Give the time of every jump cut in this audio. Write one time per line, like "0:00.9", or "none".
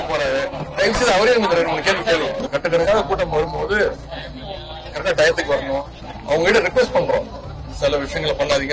0:02.4
0:06.1